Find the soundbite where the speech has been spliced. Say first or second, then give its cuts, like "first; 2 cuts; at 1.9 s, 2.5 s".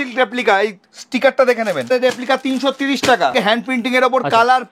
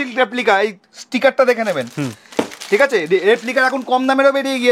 first; 2 cuts; at 1.9 s, 3.3 s